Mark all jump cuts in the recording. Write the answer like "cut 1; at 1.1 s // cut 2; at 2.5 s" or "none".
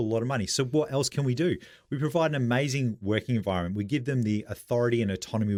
none